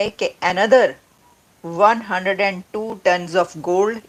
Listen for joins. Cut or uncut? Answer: uncut